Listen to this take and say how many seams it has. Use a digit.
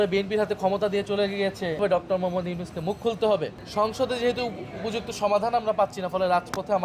2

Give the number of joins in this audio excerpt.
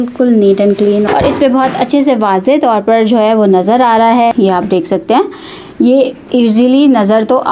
2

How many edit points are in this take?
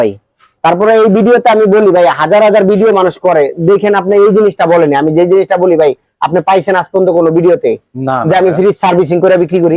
0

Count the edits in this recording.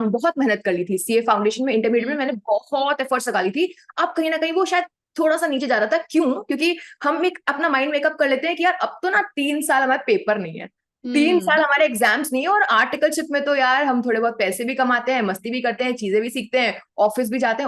0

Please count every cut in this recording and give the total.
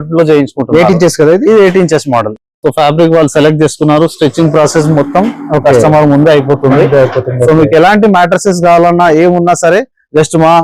0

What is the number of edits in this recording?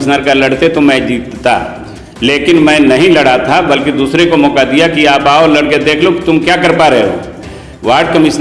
0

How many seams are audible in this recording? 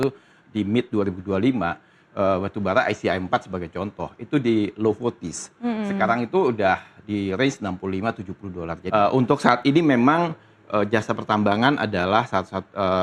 1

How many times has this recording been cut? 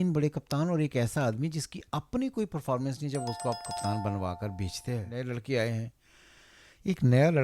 1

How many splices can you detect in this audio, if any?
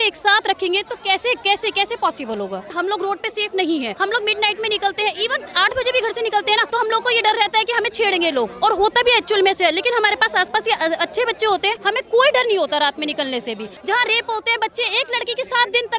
5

